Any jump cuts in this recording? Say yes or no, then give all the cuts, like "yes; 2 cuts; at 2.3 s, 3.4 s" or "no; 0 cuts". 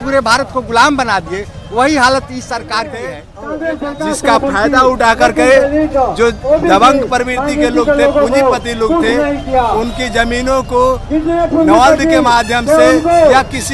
yes; 1 cut; at 3.3 s